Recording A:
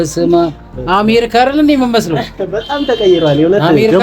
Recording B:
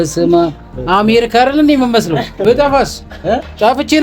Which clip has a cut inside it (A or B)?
B